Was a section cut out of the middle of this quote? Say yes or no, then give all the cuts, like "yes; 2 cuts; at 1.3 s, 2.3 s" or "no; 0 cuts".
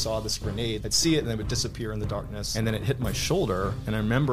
yes; 2 cuts; at 0.8 s, 2.4 s